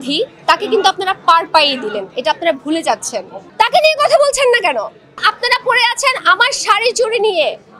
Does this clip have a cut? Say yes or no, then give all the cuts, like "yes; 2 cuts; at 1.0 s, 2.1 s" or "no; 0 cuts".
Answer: yes; 2 cuts; at 3.4 s, 5.2 s